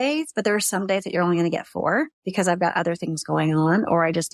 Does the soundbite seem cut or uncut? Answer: cut